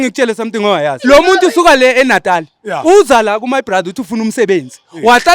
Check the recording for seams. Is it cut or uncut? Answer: cut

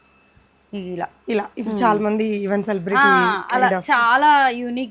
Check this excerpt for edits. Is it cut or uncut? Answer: uncut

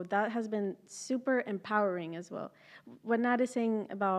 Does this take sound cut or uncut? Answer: uncut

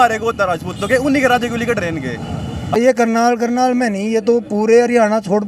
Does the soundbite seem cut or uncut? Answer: cut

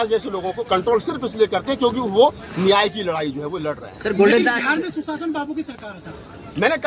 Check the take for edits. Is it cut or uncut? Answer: uncut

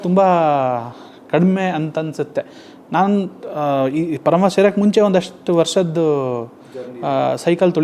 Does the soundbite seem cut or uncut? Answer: uncut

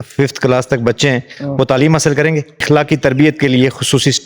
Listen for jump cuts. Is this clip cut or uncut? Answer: cut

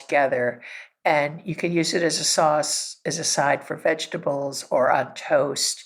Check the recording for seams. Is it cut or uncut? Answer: uncut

